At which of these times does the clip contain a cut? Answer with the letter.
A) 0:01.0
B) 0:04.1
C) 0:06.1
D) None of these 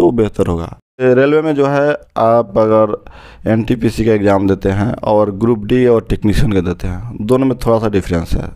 A